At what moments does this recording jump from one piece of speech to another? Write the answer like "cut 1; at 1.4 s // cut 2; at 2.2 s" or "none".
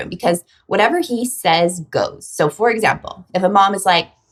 none